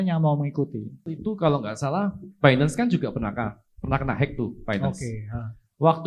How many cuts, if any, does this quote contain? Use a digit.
1